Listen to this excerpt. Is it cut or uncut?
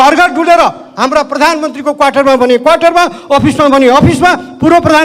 uncut